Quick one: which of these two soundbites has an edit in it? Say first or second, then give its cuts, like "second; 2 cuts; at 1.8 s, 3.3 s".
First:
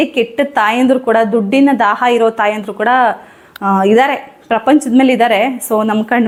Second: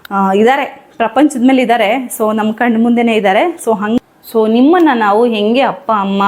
second; 1 cut; at 4.0 s